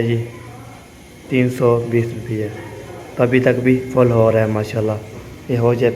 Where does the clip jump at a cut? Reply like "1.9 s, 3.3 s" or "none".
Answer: none